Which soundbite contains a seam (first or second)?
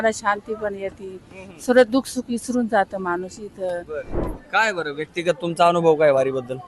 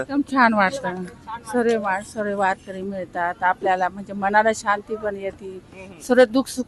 first